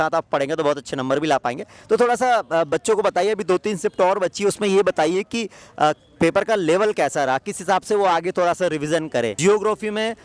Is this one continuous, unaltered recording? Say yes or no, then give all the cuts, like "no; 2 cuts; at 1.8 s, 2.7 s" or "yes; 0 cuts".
no; 1 cut; at 9.3 s